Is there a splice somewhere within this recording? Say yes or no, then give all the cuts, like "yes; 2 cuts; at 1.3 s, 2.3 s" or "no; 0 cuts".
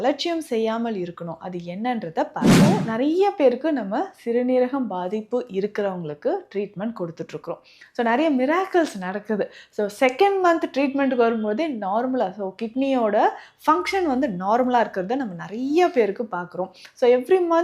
yes; 1 cut; at 2.7 s